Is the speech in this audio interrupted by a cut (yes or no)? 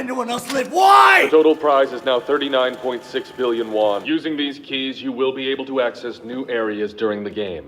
yes